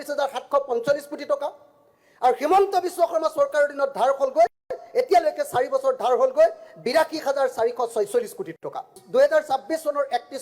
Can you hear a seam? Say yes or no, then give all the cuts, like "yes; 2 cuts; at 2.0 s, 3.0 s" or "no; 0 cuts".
yes; 1 cut; at 9.0 s